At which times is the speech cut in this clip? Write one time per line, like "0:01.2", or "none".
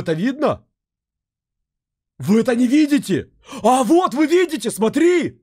none